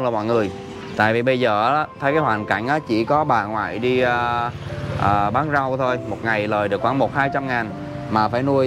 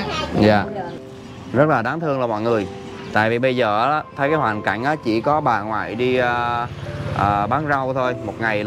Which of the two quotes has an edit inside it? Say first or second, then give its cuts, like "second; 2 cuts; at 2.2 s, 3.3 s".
second; 1 cut; at 0.9 s